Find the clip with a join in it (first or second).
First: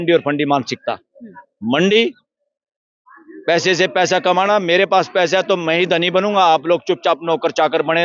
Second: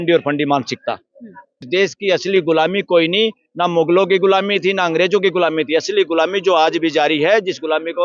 second